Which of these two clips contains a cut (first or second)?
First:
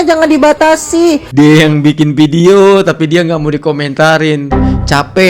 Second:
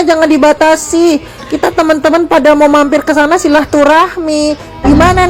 first